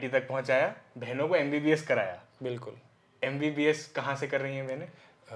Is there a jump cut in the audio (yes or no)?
no